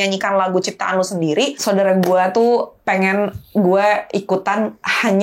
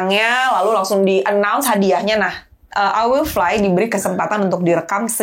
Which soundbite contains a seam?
first; 1 cut; at 1.6 s

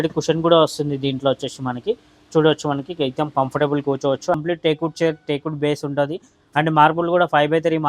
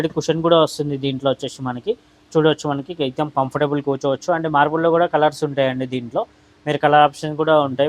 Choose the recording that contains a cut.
first; 1 cut; at 4.4 s

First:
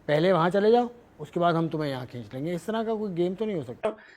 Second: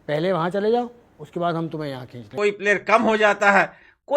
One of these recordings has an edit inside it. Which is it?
second; 1 cut; at 2.3 s

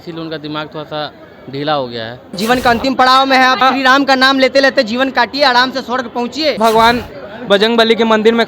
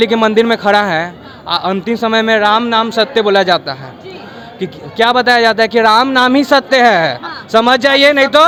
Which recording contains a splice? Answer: first; 3 cuts; at 2.4 s, 3.6 s, 6.6 s

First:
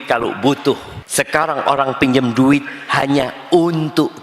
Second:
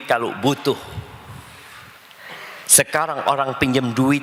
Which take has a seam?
first; 1 cut; at 1.0 s

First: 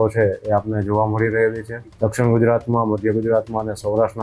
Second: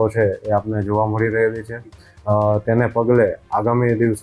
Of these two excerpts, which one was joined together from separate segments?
first; 1 cut; at 1.8 s

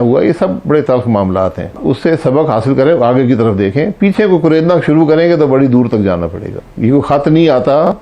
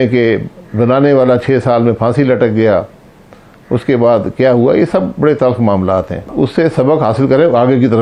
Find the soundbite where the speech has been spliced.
first; 1 cut; at 6.6 s

